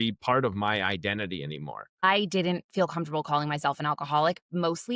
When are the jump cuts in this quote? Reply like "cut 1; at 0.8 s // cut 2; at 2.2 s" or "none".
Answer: cut 1; at 2.1 s